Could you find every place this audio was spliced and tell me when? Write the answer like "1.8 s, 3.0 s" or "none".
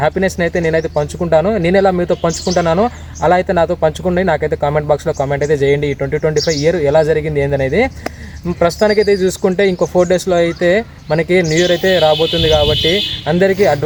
none